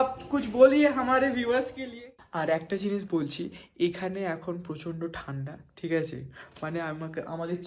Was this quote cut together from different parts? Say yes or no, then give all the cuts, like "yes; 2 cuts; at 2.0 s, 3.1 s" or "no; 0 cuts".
yes; 1 cut; at 2.0 s